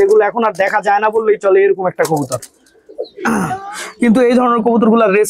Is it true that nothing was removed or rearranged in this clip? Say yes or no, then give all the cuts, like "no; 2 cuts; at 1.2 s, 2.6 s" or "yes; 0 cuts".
no; 1 cut; at 3.3 s